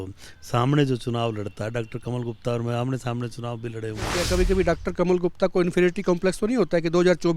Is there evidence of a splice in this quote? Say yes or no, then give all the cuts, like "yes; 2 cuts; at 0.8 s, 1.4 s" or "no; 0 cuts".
yes; 1 cut; at 4.2 s